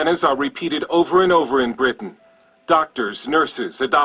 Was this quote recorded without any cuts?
yes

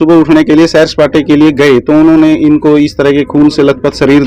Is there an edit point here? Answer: no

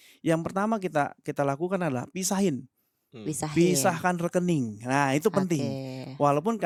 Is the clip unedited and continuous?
yes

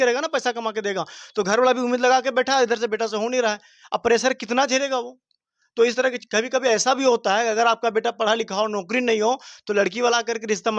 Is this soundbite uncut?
yes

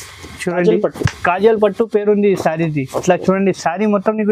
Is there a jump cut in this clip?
no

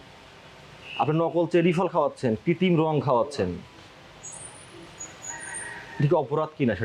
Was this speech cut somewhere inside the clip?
no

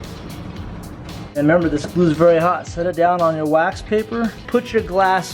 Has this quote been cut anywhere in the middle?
yes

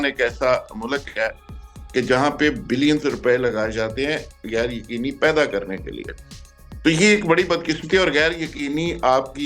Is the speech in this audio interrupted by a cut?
no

